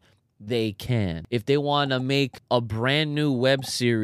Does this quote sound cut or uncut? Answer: cut